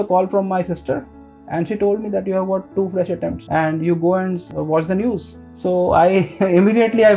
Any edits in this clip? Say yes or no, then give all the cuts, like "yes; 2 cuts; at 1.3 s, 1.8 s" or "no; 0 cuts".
yes; 2 cuts; at 3.4 s, 4.4 s